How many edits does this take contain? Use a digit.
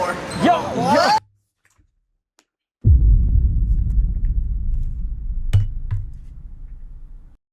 0